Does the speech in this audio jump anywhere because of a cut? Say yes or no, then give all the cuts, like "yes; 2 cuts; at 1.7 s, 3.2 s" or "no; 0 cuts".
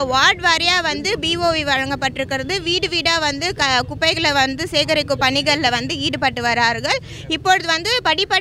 no; 0 cuts